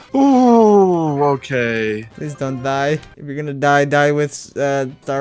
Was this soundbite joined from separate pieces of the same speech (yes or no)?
no